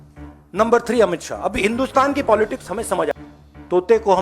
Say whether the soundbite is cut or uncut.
cut